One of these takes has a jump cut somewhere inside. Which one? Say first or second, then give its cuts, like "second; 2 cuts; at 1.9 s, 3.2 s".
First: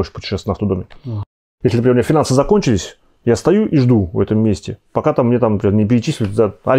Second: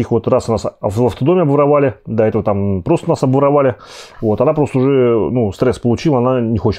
first; 1 cut; at 1.3 s